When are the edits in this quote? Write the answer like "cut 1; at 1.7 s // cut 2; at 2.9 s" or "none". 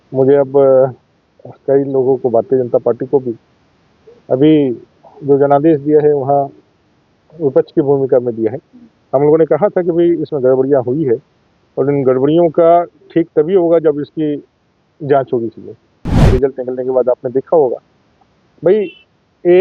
cut 1; at 16.3 s